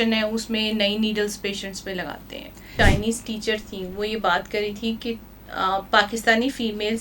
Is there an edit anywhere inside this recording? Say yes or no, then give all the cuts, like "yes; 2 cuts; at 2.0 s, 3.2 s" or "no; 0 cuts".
yes; 1 cut; at 2.7 s